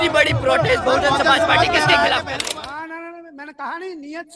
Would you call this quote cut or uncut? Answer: cut